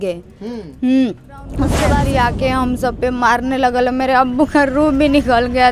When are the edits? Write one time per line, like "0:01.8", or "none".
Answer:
0:01.8

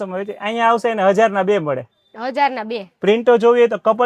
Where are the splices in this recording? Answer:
none

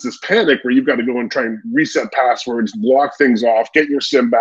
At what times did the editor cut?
none

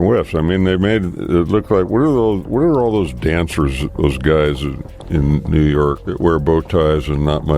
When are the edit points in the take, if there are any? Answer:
none

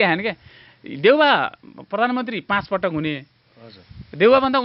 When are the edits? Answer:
none

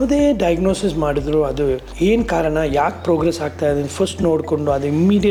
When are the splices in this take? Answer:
none

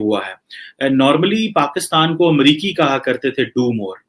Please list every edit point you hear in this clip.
none

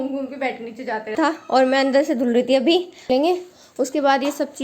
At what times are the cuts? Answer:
0:01.2
0:03.1

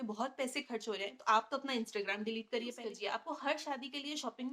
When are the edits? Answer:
0:02.9

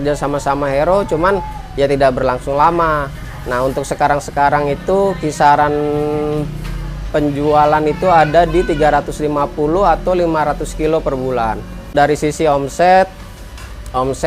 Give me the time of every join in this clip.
0:11.9

